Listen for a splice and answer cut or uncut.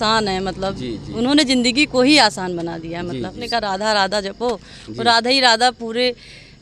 cut